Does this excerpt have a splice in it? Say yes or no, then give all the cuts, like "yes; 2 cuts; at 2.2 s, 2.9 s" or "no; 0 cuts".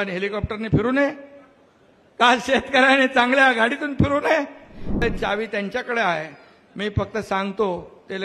yes; 1 cut; at 5.0 s